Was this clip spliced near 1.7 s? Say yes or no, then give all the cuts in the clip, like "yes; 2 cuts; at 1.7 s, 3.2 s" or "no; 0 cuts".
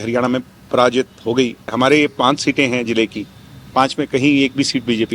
yes; 1 cut; at 1.7 s